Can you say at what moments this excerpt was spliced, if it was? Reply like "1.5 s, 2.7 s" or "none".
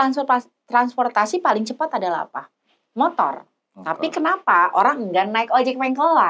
none